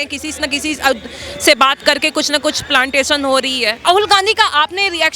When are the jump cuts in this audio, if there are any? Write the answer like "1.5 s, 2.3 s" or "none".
3.8 s